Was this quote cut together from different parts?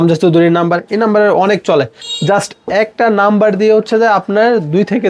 no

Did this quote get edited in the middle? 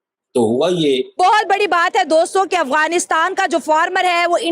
yes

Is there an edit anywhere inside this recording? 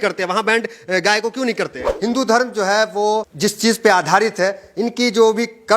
yes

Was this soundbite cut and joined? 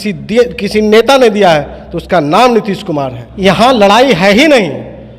yes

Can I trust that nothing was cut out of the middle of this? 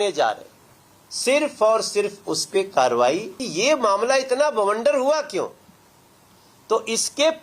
no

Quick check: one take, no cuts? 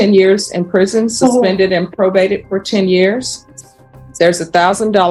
yes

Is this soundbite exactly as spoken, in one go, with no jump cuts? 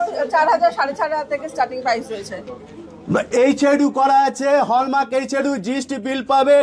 yes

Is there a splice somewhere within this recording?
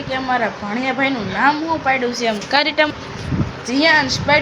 yes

